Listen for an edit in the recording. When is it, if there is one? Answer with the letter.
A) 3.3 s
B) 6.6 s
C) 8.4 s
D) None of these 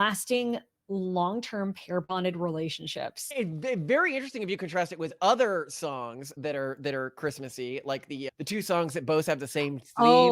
A